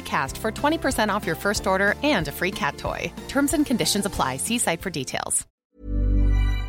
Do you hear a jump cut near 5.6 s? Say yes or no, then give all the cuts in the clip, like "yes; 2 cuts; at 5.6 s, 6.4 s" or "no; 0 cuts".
yes; 1 cut; at 5.6 s